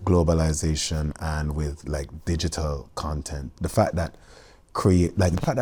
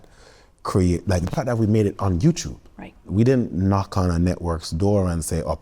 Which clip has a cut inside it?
second; 1 cut; at 3.1 s

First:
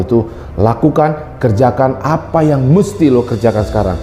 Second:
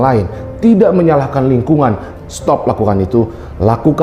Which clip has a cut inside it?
second; 1 cut; at 2.1 s

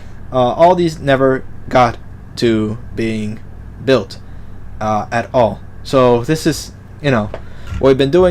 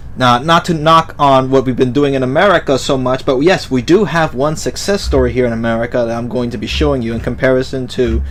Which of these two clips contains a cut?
first; 1 cut; at 6.4 s

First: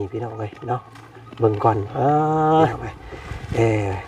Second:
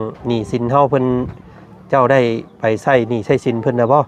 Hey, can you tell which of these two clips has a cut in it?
first; 1 cut; at 2.7 s

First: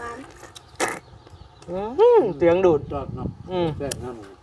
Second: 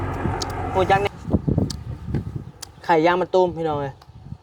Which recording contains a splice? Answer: second; 1 cut; at 1.1 s

